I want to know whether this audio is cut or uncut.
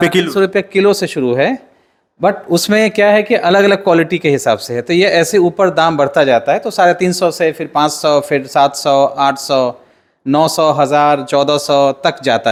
uncut